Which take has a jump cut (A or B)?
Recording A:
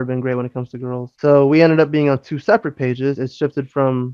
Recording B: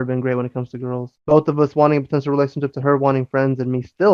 B